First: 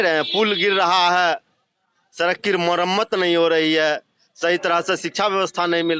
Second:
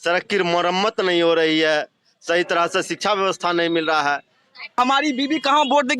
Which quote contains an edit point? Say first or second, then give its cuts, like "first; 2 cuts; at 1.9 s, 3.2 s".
second; 1 cut; at 4.8 s